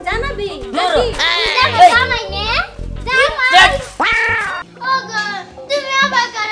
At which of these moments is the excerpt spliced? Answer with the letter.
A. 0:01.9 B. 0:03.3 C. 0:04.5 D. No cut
C